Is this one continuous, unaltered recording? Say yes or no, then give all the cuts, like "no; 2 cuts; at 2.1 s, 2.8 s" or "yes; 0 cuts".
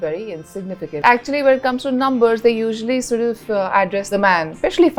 yes; 0 cuts